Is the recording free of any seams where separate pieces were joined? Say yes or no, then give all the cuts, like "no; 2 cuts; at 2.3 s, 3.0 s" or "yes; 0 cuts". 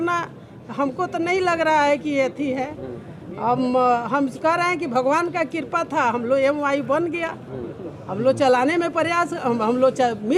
yes; 0 cuts